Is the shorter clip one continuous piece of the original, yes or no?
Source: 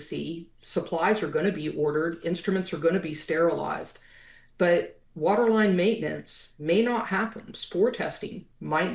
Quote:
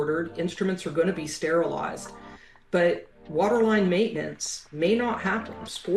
yes